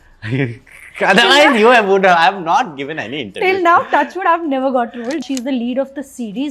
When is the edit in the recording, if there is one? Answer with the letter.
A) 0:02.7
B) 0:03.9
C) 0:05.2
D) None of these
C